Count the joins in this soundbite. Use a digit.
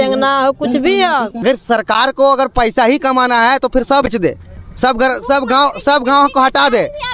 1